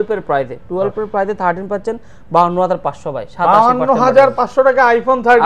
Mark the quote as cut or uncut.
uncut